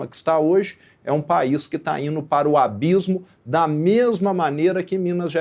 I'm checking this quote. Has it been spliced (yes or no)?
no